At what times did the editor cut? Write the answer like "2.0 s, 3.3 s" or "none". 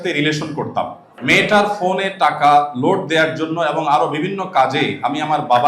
1.1 s